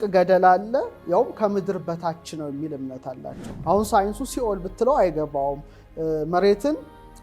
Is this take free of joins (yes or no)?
no